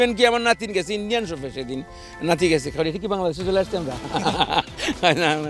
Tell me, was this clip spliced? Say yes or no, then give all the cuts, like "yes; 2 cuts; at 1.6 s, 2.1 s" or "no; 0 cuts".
no; 0 cuts